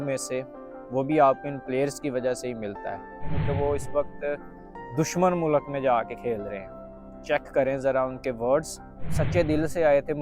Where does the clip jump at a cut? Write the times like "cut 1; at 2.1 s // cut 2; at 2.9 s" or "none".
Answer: cut 1; at 3.3 s // cut 2; at 9.1 s